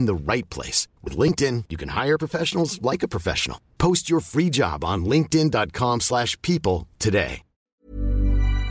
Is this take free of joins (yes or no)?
no